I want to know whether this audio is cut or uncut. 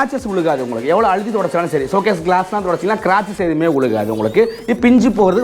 uncut